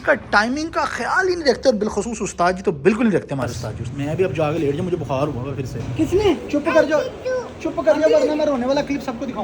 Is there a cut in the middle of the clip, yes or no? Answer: yes